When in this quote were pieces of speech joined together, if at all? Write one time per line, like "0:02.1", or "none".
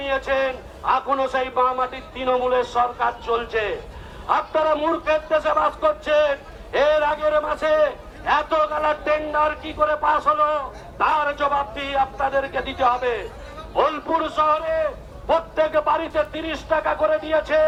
none